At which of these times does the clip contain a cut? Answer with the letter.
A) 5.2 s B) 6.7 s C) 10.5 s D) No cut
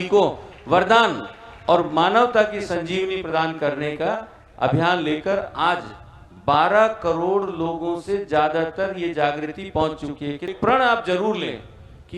C